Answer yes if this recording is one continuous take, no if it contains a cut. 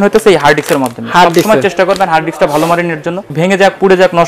no